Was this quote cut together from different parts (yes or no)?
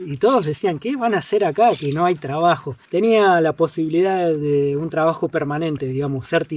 yes